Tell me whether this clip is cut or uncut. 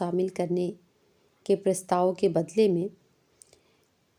uncut